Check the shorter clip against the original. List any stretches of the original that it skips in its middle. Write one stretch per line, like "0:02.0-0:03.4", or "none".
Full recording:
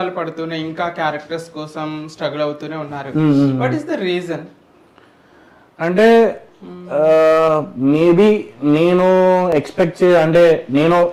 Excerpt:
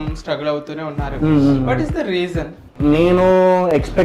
0:04.6-0:08.5